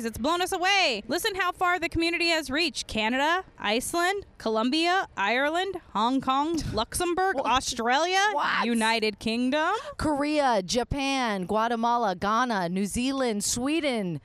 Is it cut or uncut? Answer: uncut